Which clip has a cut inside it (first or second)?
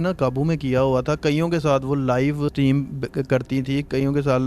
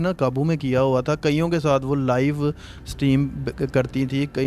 first